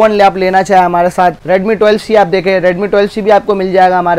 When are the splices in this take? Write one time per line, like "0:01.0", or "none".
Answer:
0:01.4